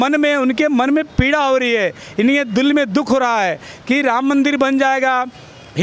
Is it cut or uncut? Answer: uncut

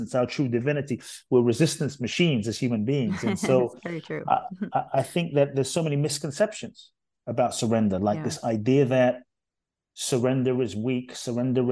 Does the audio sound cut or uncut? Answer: uncut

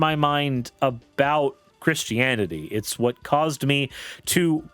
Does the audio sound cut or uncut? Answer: cut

